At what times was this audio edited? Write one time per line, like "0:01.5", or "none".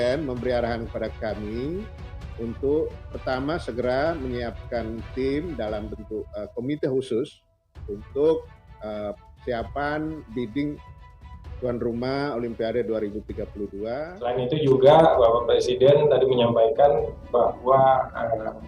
0:14.1